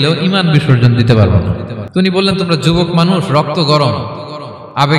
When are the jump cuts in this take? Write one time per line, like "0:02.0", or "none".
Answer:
0:01.7